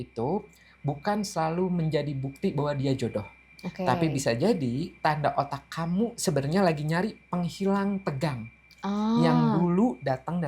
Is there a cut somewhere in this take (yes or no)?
no